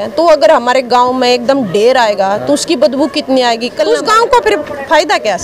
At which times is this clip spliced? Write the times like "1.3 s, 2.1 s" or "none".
3.8 s

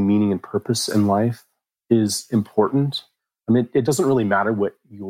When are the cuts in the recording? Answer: 3.6 s

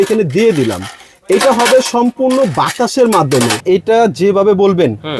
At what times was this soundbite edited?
3.6 s

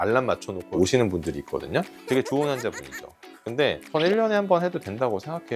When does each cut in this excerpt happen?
3.8 s

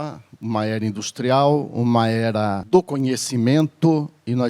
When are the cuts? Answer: 2.6 s

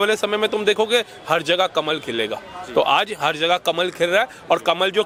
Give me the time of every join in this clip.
none

